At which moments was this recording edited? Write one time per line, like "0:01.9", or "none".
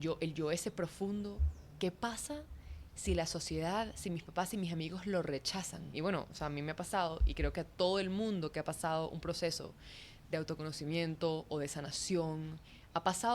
0:05.9